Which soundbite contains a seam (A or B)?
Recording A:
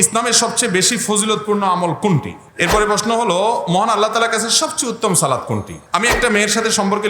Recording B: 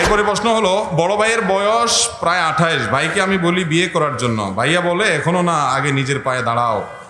A